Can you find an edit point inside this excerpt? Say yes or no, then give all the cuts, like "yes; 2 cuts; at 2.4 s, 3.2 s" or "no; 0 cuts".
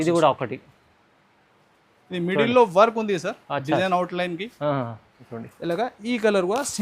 yes; 1 cut; at 5.3 s